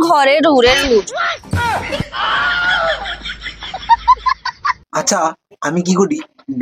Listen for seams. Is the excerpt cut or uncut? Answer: cut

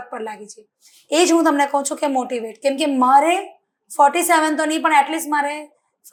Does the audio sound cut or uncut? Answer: uncut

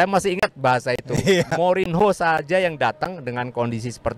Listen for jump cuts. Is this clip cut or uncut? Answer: uncut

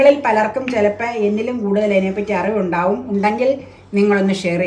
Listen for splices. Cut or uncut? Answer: uncut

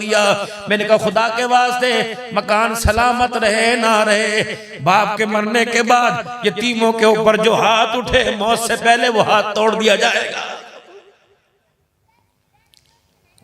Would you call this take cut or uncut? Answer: uncut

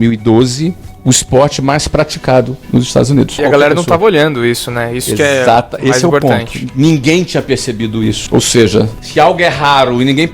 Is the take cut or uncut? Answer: cut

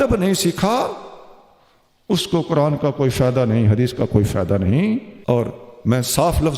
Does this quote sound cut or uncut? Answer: cut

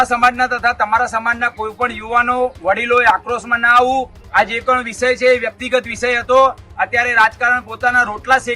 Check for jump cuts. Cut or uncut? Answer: cut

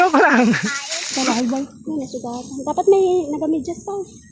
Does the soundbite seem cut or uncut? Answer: cut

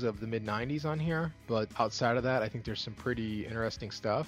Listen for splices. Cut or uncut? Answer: cut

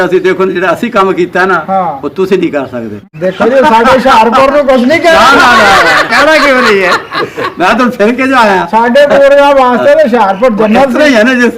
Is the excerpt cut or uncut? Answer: cut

